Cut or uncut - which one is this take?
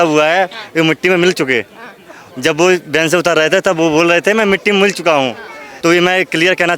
uncut